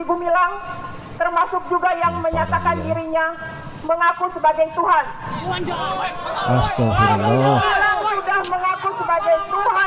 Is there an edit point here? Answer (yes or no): no